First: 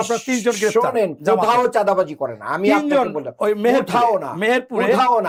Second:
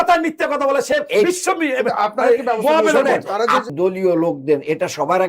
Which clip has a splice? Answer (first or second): second